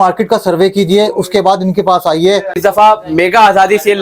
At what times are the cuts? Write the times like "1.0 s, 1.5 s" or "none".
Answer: 2.6 s